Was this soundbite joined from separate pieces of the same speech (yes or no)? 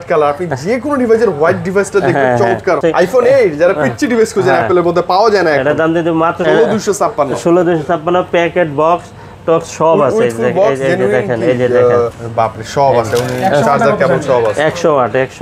yes